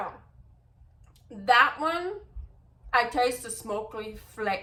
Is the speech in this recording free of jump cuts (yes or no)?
yes